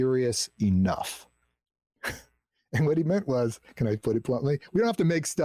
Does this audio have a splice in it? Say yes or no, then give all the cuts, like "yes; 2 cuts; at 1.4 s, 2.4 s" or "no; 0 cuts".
no; 0 cuts